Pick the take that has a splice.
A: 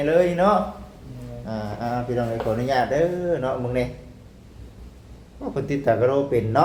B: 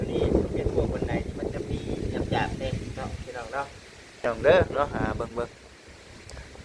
B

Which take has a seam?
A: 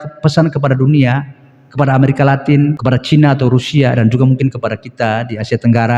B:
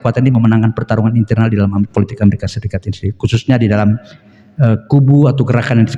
A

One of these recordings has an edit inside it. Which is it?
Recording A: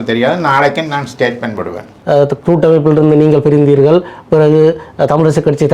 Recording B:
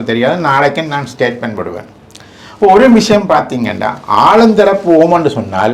A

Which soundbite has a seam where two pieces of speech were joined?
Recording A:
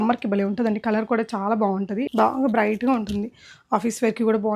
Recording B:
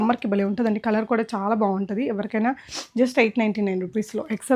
A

